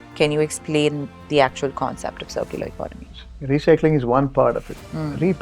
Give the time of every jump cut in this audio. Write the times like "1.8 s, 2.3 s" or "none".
3.2 s